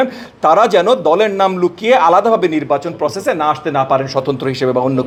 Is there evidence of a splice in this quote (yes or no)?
no